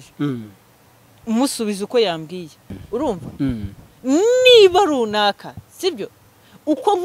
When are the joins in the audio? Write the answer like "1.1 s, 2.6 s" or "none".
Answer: 2.8 s